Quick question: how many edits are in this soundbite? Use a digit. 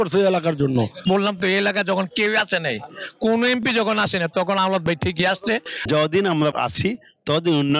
2